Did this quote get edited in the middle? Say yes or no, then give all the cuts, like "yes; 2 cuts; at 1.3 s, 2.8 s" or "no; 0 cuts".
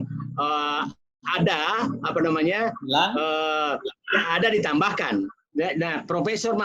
yes; 1 cut; at 5.4 s